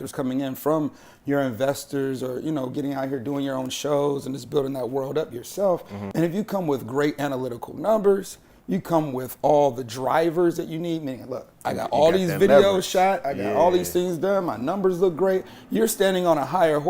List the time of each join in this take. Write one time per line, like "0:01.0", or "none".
0:06.0